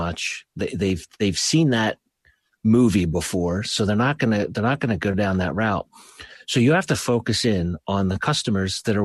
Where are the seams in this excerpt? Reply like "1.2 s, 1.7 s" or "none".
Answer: none